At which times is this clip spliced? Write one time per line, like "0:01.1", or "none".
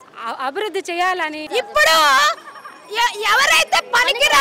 0:01.5